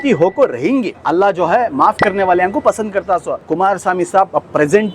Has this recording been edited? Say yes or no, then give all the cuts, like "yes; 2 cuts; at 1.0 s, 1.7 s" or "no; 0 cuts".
yes; 2 cuts; at 0.9 s, 3.4 s